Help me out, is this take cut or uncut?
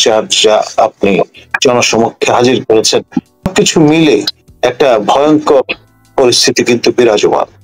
cut